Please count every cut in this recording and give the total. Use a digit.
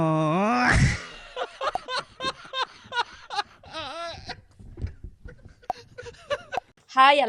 0